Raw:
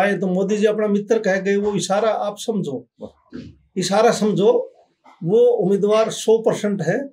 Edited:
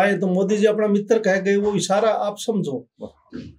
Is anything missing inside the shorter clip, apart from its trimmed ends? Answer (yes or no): no